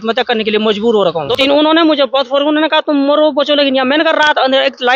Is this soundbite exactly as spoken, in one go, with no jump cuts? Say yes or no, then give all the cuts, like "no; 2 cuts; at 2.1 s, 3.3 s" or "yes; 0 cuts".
no; 1 cut; at 0.9 s